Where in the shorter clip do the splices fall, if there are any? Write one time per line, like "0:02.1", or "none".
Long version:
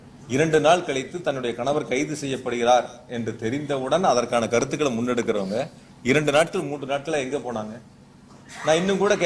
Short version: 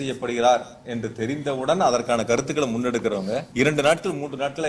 0:03.5